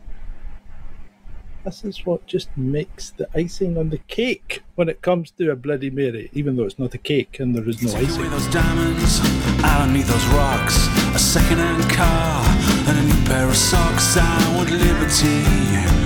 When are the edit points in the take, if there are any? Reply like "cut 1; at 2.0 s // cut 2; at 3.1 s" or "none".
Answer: cut 1; at 8.2 s